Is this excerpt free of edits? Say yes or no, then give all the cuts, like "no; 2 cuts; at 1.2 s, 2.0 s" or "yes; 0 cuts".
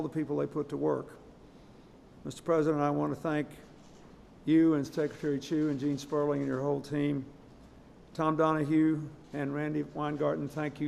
no; 1 cut; at 3.0 s